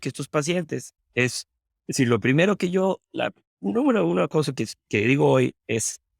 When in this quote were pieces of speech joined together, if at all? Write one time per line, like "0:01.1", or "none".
0:01.0